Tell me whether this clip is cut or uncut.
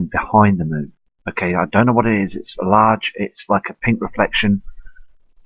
cut